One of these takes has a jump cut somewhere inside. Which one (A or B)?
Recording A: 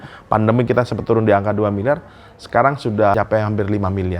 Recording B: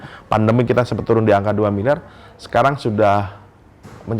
A